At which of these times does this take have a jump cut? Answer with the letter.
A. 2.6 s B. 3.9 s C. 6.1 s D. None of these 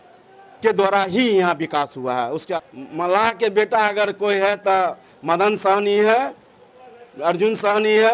A